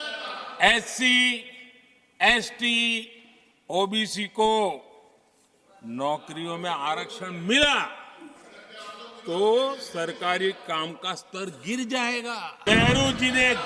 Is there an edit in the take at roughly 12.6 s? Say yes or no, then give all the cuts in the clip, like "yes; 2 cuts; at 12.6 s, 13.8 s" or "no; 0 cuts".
yes; 1 cut; at 12.6 s